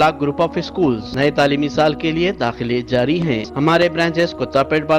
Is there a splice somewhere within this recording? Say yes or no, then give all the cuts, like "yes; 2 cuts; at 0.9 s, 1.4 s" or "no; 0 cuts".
yes; 2 cuts; at 1.1 s, 3.5 s